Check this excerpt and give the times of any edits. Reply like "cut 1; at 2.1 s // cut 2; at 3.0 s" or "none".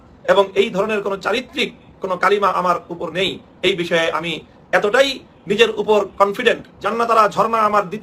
cut 1; at 6.7 s